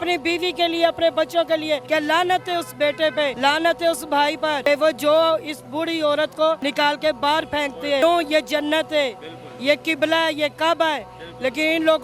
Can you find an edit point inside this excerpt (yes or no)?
yes